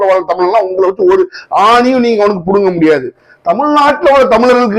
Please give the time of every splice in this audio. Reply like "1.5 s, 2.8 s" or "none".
none